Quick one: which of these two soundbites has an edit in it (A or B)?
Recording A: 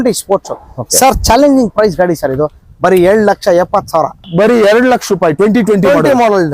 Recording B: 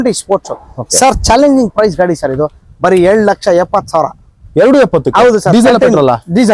A